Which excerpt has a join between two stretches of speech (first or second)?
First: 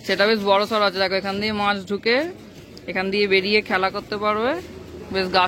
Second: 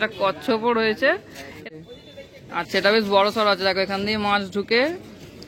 second